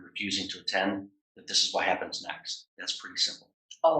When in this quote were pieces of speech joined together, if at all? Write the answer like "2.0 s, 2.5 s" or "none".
2.6 s

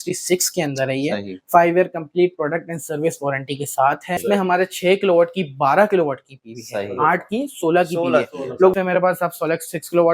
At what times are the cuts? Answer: 4.2 s, 8.7 s

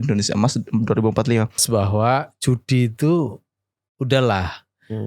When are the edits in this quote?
1.6 s

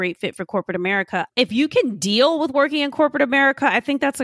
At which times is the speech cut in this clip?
1.3 s

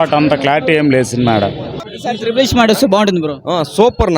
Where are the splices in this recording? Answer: 1.8 s

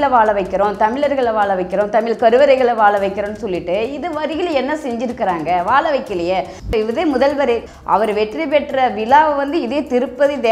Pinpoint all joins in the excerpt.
6.6 s, 7.7 s

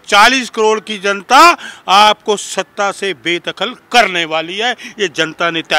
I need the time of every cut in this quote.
none

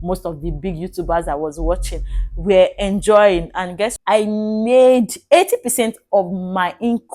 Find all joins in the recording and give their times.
4.0 s

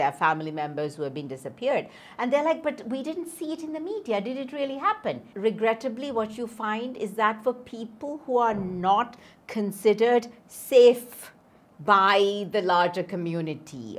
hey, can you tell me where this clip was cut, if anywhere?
5.3 s

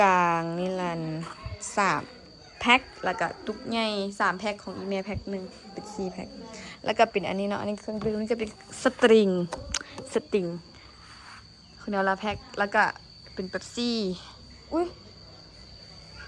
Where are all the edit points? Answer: none

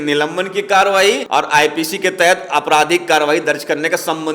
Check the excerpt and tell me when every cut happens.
1.2 s

